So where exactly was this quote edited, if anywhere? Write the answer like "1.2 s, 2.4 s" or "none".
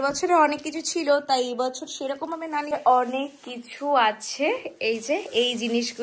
2.7 s